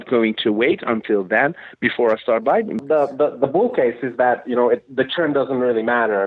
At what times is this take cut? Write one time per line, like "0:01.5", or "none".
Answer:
0:02.8